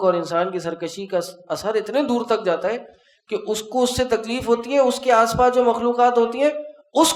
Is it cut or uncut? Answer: uncut